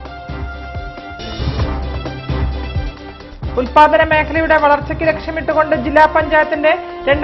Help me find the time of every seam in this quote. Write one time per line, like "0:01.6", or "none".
0:01.1
0:02.5